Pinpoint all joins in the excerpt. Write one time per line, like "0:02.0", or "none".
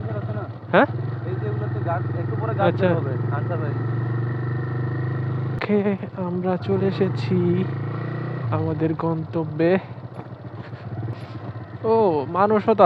0:05.6
0:11.1